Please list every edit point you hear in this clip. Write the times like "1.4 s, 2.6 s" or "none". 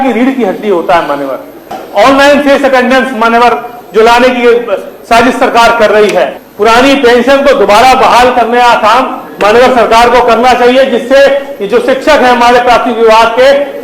1.8 s, 6.4 s